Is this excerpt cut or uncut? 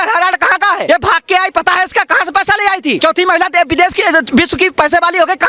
cut